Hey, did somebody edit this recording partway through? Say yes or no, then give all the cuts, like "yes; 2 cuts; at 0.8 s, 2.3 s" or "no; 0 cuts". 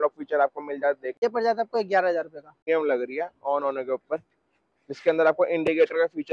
yes; 2 cuts; at 1.2 s, 2.6 s